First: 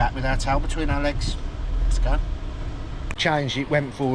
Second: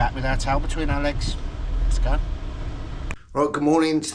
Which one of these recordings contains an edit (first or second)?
first